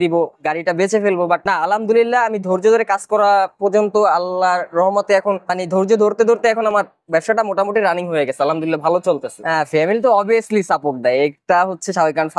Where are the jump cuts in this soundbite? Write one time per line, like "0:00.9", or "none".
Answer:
none